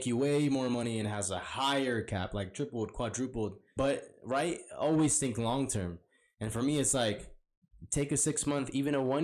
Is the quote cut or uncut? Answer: cut